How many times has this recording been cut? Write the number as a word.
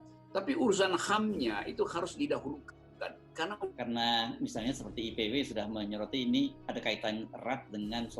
one